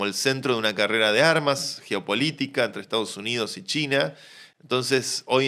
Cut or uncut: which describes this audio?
uncut